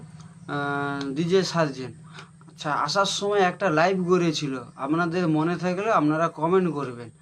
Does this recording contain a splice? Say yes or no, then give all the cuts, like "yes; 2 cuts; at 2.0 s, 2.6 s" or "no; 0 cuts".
no; 0 cuts